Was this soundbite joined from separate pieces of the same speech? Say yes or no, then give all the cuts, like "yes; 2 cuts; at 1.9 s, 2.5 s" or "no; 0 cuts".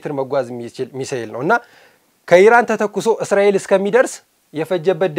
no; 0 cuts